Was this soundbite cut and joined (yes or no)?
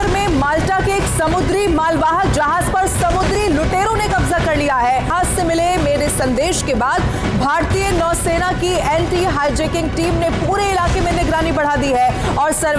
no